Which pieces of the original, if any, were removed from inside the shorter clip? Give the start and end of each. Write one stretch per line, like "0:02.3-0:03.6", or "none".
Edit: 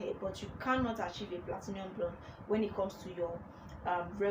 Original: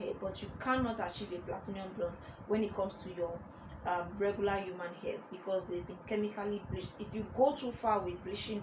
none